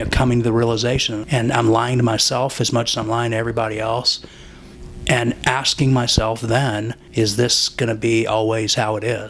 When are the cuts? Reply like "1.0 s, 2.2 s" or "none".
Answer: 1.2 s, 7.0 s